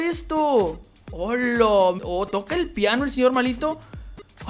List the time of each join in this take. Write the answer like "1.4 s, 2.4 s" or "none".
2.0 s